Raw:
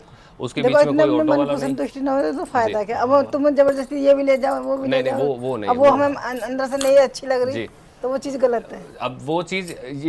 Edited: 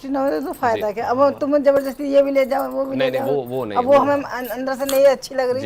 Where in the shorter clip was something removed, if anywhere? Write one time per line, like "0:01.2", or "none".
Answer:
none